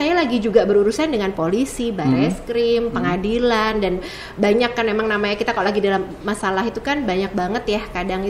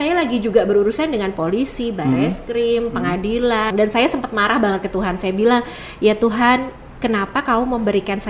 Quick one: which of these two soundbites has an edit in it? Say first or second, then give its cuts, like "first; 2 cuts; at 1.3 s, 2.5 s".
second; 1 cut; at 3.7 s